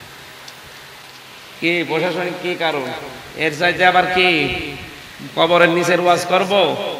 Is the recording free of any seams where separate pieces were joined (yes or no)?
no